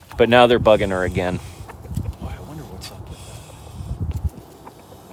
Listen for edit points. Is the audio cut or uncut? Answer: uncut